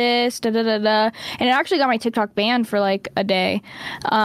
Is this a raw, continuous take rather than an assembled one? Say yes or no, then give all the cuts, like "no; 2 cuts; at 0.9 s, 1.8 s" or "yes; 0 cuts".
yes; 0 cuts